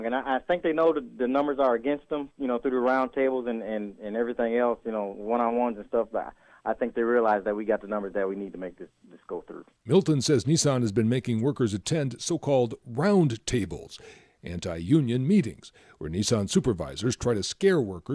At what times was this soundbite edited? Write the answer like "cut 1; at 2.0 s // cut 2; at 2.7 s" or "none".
cut 1; at 9.6 s

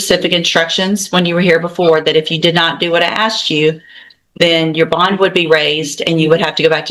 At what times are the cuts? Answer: none

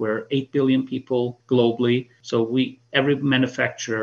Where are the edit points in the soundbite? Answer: cut 1; at 1.4 s // cut 2; at 2.2 s

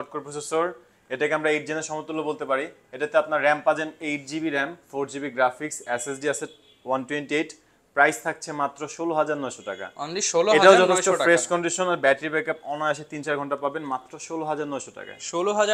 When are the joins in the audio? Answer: none

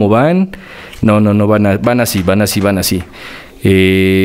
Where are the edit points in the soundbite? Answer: none

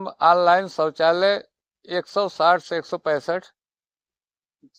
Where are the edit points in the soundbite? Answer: none

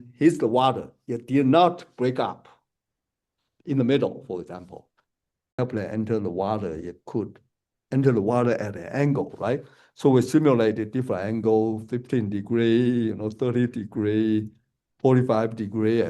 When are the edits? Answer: cut 1; at 5.6 s

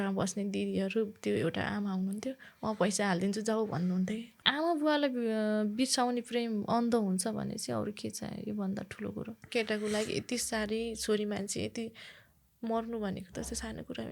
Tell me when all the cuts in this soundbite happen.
cut 1; at 4.4 s // cut 2; at 9.4 s

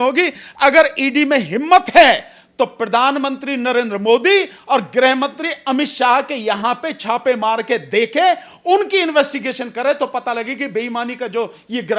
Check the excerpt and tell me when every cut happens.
none

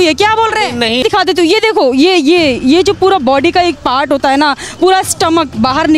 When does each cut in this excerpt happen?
cut 1; at 1.0 s

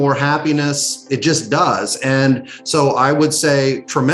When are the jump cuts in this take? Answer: none

